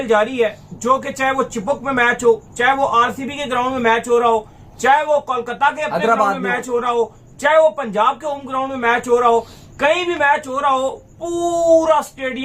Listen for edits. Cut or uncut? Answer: uncut